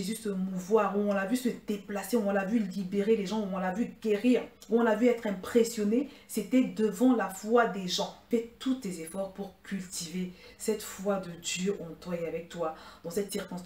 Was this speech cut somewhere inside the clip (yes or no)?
yes